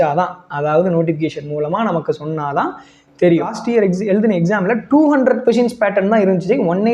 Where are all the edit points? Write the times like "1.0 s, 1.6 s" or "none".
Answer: 3.6 s

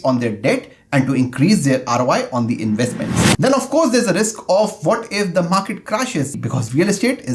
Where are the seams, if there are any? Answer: 3.2 s, 6.3 s

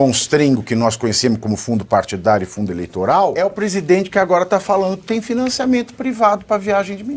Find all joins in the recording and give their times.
3.4 s

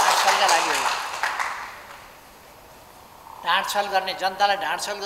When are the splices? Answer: none

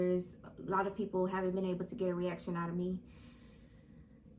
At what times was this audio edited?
none

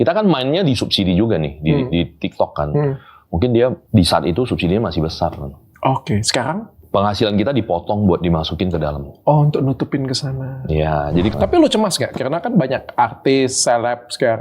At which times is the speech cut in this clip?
3.8 s, 6.7 s, 11.3 s

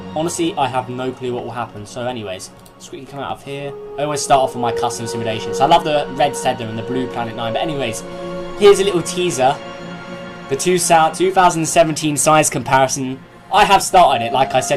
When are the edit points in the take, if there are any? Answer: 7.1 s

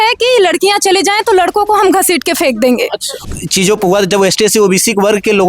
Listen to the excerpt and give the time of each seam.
3.2 s

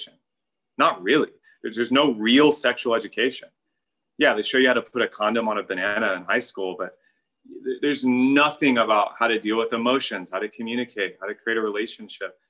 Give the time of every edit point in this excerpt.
none

